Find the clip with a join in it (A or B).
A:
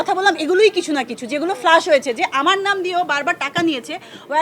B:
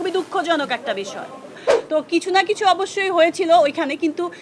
B